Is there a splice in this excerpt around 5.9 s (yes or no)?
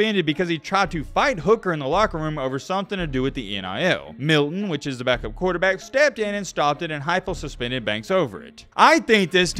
no